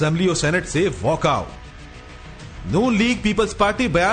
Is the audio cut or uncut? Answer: uncut